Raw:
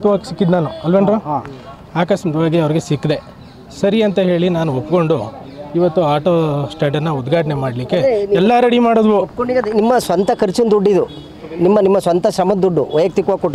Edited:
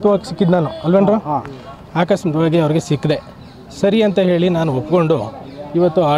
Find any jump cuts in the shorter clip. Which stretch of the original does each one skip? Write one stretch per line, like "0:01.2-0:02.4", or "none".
none

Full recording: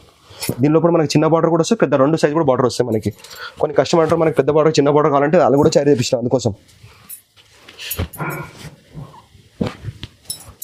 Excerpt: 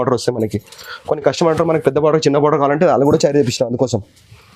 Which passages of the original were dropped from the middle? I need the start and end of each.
none

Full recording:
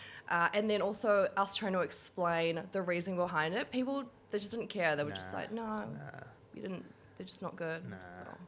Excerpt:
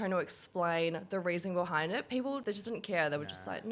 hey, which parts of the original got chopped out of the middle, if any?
0:04.0-0:04.3

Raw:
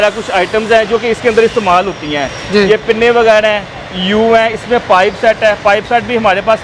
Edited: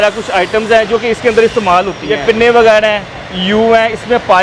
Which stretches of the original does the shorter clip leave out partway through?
0:02.2-0:02.8

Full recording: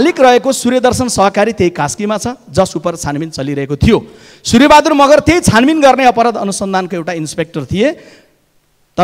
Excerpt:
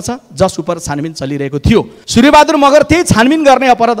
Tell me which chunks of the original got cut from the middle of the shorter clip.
0:04.1-0:04.3

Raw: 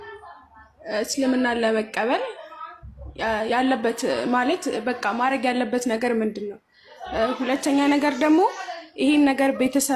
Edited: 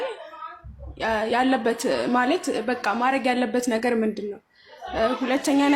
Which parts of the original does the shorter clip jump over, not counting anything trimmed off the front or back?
none

